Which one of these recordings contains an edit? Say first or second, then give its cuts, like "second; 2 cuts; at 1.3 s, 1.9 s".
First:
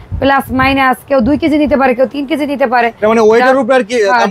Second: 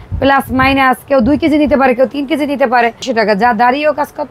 second; 1 cut; at 3.0 s